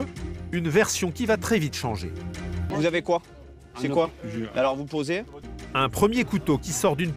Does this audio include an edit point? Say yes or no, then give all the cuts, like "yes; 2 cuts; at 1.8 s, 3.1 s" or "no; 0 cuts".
yes; 2 cuts; at 2.7 s, 5.4 s